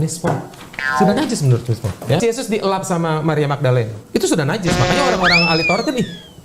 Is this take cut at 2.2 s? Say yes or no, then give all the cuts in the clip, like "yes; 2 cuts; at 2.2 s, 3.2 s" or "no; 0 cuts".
yes; 1 cut; at 2.2 s